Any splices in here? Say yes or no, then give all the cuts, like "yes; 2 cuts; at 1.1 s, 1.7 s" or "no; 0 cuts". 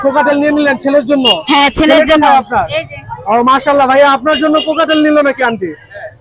no; 0 cuts